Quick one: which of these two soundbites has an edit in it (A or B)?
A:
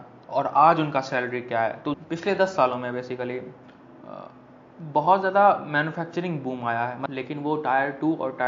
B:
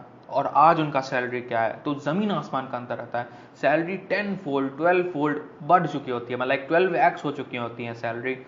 A